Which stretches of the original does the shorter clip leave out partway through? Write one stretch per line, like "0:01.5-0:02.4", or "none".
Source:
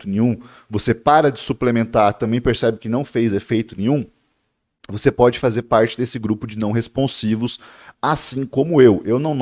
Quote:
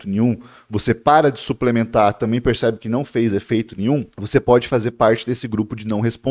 0:04.2-0:04.9